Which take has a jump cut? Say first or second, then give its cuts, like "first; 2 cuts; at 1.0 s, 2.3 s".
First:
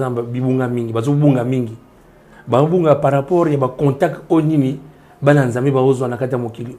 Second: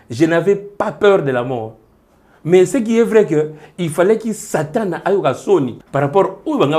second; 1 cut; at 5.8 s